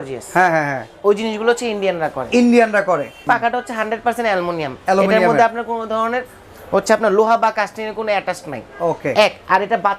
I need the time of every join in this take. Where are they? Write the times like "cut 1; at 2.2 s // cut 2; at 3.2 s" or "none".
cut 1; at 3.2 s